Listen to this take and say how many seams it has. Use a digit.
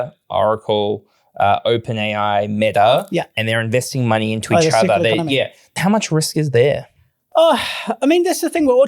1